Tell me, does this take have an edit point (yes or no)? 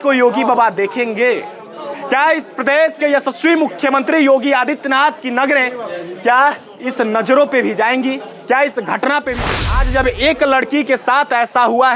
yes